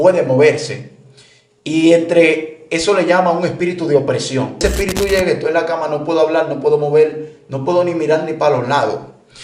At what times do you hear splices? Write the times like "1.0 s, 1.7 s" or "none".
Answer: 4.6 s

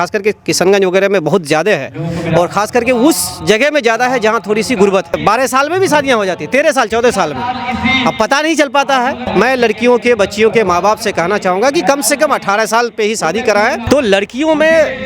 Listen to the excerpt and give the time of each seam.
5.2 s, 9.2 s, 13.8 s

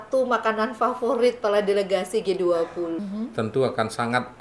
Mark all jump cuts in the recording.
3.0 s

